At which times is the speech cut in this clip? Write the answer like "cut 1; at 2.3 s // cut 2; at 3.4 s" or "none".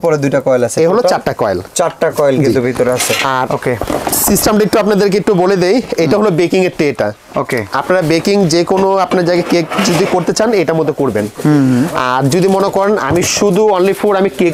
none